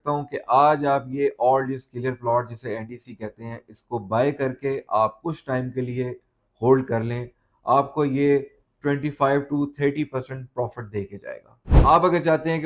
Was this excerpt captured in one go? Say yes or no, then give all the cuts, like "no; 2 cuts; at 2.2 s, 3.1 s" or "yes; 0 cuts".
no; 1 cut; at 11.6 s